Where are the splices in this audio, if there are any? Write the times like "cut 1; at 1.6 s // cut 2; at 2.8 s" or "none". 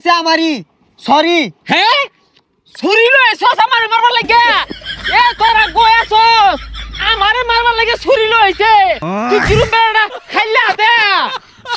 none